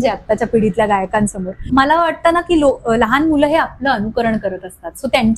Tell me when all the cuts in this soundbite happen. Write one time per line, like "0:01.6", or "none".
0:01.6